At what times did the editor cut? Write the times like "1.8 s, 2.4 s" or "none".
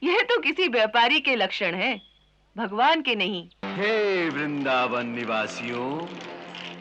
3.6 s